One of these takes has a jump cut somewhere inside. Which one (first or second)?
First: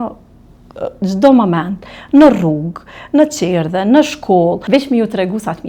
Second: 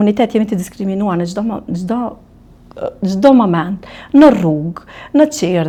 first